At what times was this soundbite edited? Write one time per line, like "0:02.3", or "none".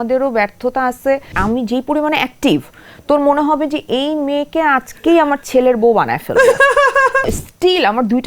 0:01.3
0:07.2